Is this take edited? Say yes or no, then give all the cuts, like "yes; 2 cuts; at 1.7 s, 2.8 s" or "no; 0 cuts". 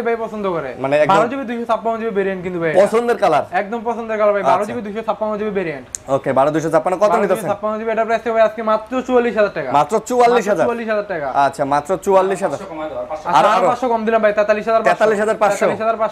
no; 0 cuts